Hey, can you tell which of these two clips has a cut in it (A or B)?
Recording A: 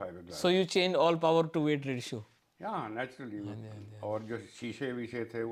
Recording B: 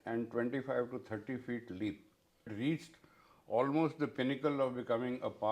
B